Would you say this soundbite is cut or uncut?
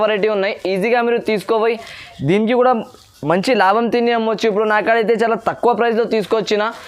uncut